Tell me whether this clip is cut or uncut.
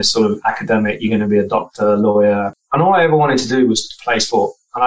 cut